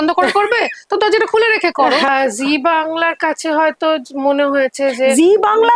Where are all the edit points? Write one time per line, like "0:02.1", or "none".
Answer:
0:02.1